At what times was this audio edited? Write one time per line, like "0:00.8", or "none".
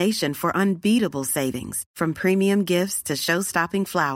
none